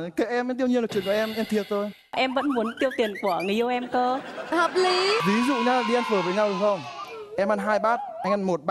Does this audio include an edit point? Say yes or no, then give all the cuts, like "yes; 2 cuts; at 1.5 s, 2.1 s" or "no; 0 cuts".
yes; 2 cuts; at 2.1 s, 5.2 s